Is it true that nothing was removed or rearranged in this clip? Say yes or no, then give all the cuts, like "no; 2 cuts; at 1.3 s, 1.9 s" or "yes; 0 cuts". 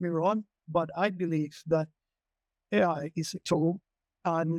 yes; 0 cuts